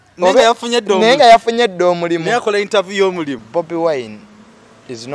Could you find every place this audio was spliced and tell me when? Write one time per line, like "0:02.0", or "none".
0:03.4